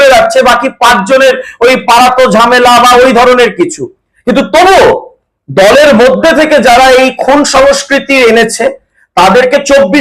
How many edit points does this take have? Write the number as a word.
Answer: zero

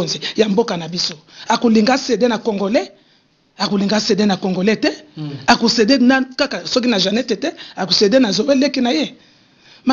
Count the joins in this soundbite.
zero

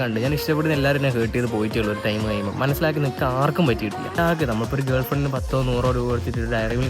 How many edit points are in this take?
one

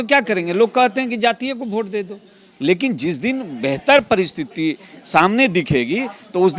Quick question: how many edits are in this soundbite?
zero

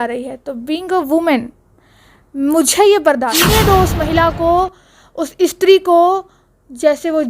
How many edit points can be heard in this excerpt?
one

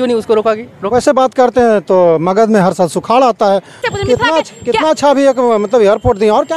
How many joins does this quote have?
one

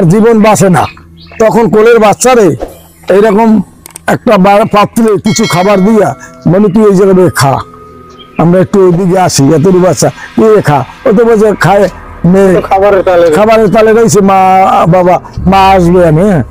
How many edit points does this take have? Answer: zero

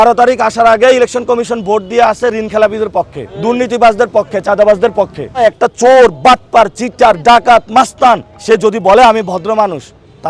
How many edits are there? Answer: three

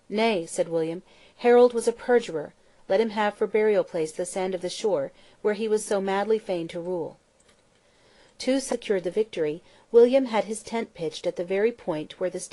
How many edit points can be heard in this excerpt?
zero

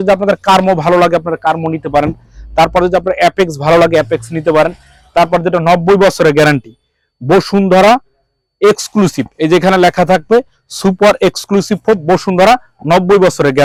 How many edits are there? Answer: zero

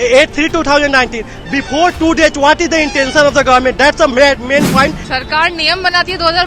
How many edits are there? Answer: one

